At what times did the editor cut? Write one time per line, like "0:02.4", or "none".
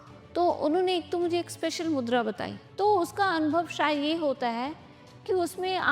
0:02.6